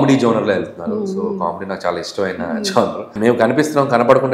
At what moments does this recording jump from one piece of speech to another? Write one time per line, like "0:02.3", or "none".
0:03.1